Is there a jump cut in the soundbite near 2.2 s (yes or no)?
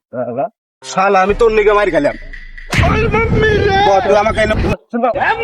no